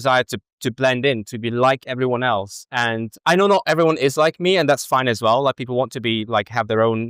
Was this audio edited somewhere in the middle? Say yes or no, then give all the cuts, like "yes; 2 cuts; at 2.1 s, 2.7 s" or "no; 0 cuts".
no; 0 cuts